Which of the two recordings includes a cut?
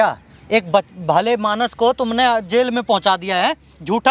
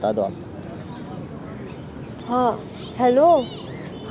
second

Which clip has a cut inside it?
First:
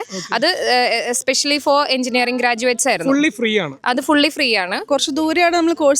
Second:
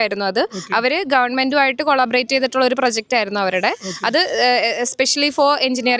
first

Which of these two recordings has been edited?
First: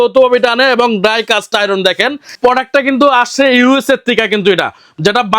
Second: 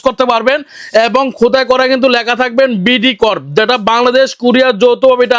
first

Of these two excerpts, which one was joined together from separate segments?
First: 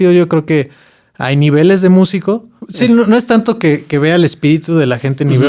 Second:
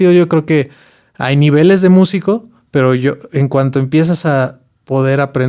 first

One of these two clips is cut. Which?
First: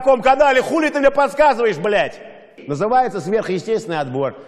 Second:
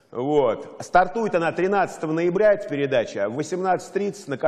first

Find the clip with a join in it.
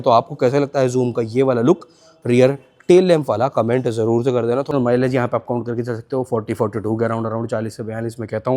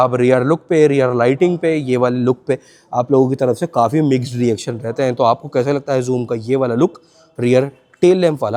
first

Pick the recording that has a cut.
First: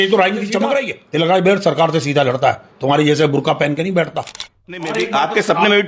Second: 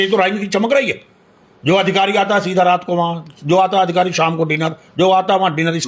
first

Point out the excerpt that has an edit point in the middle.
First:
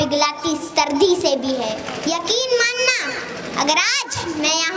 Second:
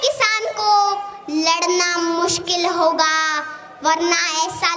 first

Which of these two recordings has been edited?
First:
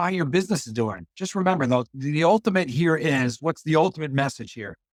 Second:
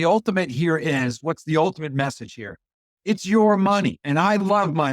second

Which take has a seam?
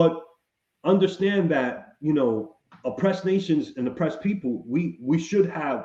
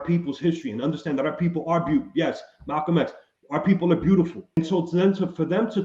second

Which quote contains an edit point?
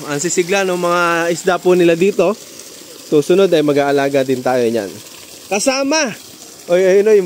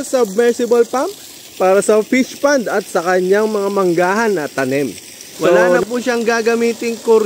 second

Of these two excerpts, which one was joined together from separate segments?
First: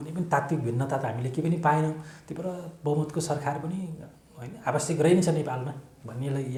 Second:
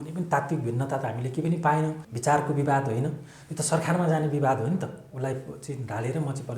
second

